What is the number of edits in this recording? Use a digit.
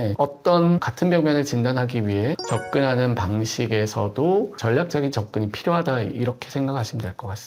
0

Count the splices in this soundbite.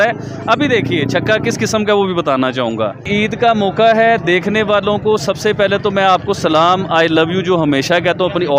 1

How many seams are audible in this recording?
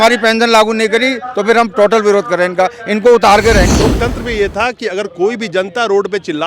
1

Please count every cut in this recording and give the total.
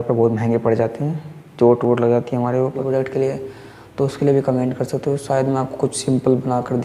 1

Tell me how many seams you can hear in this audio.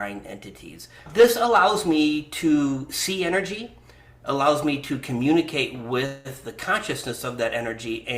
1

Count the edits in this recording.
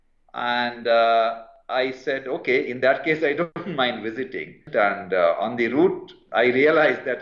2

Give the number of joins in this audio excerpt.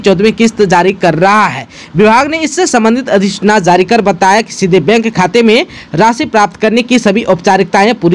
0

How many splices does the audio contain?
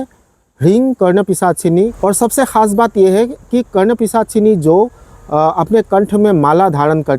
1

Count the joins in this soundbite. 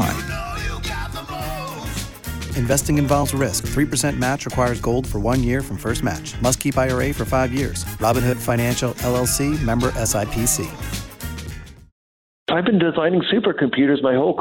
1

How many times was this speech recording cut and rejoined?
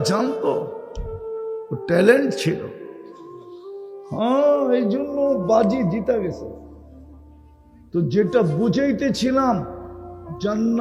0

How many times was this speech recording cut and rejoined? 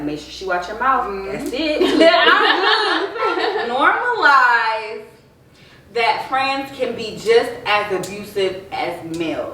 1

